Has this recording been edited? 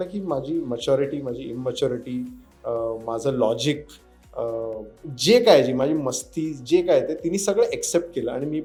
no; 0 cuts

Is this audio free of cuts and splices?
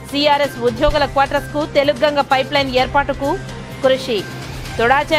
yes; 0 cuts

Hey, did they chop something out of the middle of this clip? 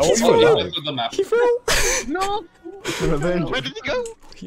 no; 0 cuts

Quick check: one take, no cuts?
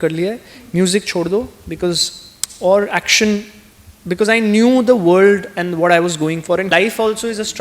no; 1 cut; at 6.7 s

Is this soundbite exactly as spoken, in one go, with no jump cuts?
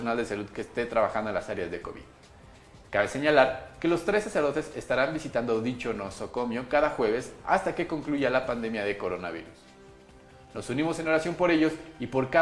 yes; 0 cuts

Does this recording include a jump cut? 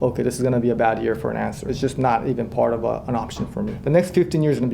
yes; 2 cuts; at 1.6 s, 3.8 s

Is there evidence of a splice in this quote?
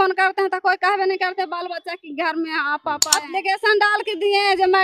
yes; 1 cut; at 3.1 s

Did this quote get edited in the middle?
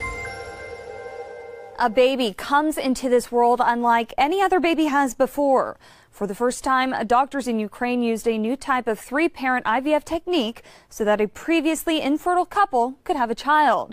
yes; 1 cut; at 1.7 s

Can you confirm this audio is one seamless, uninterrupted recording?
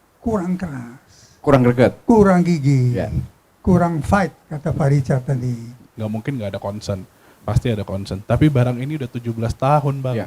no; 1 cut; at 6.0 s

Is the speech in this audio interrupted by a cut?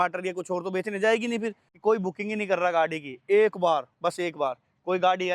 yes; 1 cut; at 1.6 s

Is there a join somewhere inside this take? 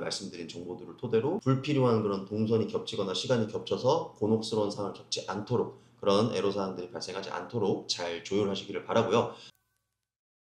yes; 1 cut; at 9.5 s

